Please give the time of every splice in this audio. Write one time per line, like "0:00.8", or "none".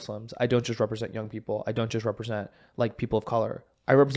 none